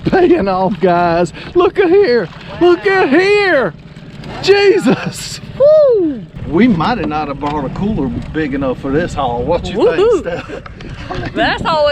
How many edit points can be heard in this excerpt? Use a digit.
1